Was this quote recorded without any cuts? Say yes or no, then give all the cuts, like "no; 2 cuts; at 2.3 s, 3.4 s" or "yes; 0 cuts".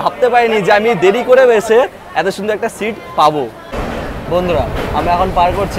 no; 1 cut; at 3.6 s